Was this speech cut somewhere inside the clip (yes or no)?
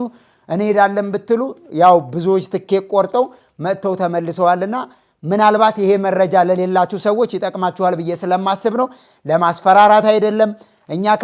no